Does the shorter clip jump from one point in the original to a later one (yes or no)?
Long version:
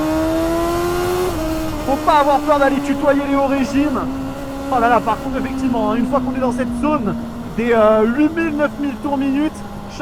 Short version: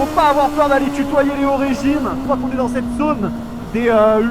yes